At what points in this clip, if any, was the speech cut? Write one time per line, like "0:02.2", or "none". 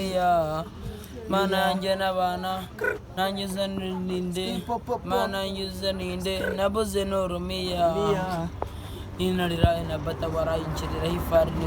none